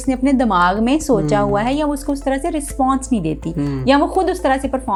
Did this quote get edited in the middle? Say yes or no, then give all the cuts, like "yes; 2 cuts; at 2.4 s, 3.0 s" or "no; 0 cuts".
no; 0 cuts